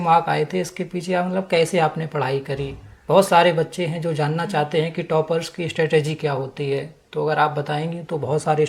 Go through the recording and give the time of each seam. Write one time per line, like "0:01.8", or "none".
none

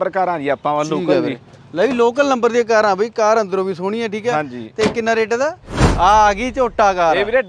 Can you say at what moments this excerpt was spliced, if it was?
0:05.7

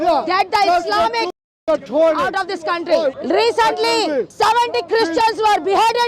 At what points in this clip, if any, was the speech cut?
0:03.1
0:04.3

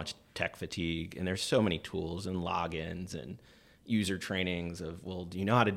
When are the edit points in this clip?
none

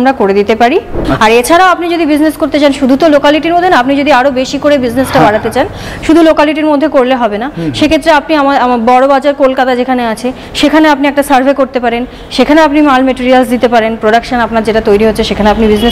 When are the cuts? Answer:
0:01.0

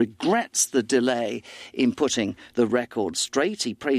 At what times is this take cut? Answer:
none

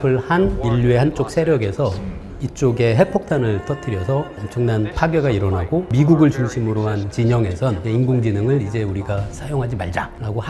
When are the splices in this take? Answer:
none

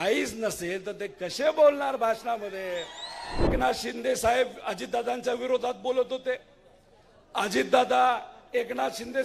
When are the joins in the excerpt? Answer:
0:03.5

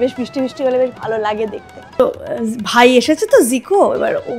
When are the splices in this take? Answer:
0:02.0

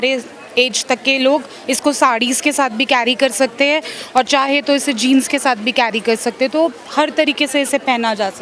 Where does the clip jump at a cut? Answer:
none

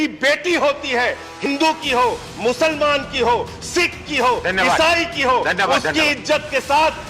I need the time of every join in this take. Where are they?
0:01.5

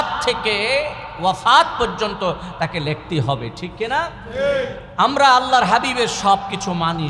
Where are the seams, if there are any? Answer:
none

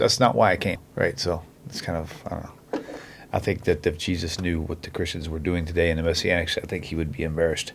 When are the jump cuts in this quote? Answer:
none

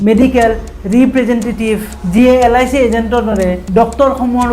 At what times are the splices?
0:01.9
0:03.6

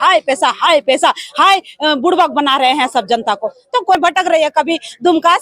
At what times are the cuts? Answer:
0:04.0

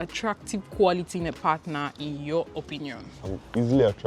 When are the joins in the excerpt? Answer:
0:03.1

